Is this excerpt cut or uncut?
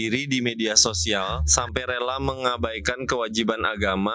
cut